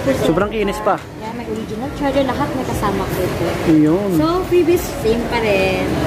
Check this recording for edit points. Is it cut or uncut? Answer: uncut